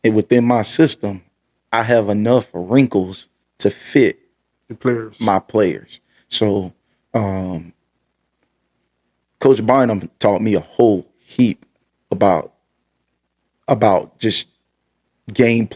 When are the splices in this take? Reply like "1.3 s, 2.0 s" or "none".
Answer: none